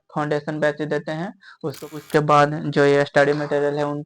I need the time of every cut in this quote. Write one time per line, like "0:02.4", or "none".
0:02.0